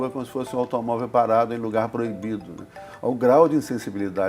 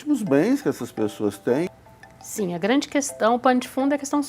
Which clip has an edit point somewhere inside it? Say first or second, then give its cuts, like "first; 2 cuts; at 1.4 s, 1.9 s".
second; 1 cut; at 1.7 s